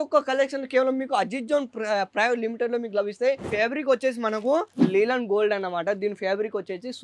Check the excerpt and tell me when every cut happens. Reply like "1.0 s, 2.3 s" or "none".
3.5 s